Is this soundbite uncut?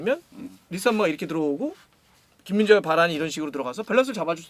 yes; 0 cuts

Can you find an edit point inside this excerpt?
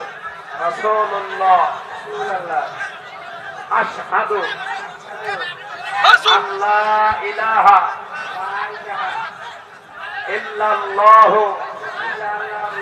no; 0 cuts

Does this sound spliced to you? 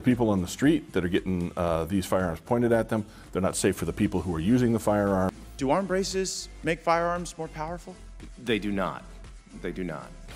no; 0 cuts

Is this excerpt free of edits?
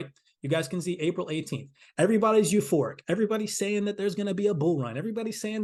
yes; 0 cuts

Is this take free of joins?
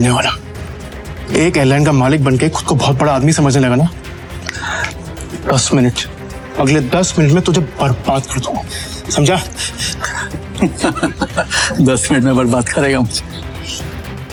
yes; 0 cuts

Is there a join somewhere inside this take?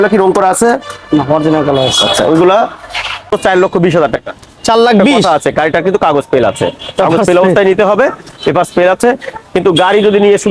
yes; 1 cut; at 3.3 s

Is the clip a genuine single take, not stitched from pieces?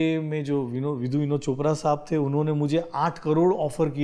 yes; 0 cuts

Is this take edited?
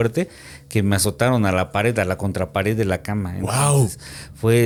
no; 0 cuts

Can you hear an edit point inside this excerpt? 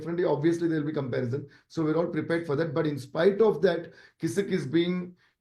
no; 0 cuts

